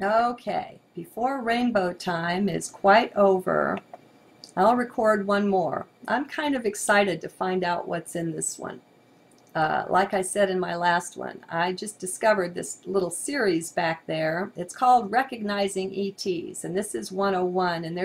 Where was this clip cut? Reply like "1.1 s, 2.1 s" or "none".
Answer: 16.8 s